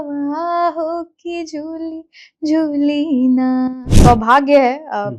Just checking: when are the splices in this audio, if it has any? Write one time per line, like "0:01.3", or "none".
0:03.9